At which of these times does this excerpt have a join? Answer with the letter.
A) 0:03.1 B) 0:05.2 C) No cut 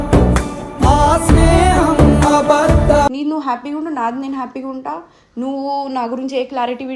A